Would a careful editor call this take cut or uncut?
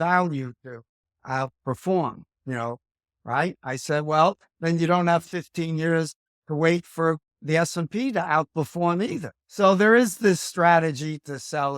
cut